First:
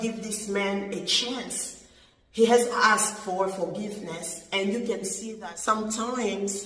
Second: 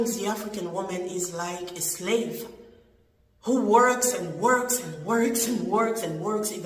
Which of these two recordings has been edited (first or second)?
first